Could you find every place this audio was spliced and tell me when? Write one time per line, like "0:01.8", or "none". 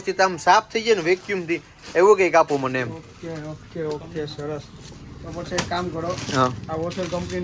none